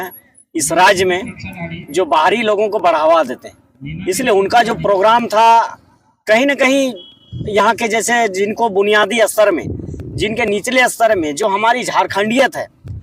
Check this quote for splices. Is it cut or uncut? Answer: uncut